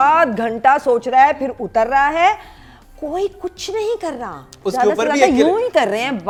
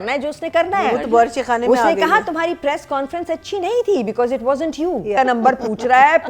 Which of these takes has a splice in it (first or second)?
second